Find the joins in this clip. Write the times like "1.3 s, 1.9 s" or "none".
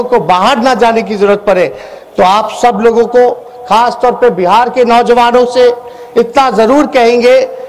none